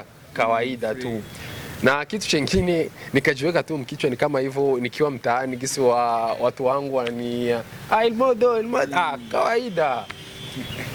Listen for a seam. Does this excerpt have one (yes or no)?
no